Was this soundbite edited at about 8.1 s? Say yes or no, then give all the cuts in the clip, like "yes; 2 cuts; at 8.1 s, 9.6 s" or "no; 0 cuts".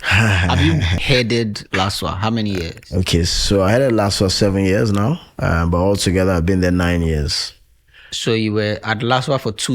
no; 1 cut; at 0.9 s